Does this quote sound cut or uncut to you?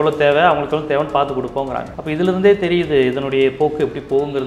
cut